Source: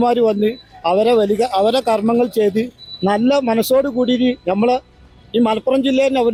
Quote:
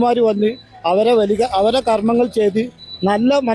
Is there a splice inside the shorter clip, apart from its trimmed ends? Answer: no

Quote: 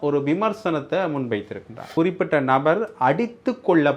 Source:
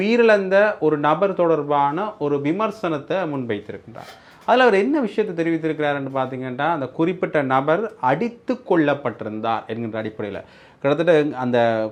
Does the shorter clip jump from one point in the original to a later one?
yes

